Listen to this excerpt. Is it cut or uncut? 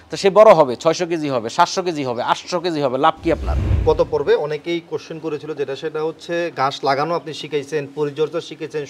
cut